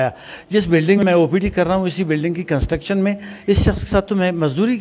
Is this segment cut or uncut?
cut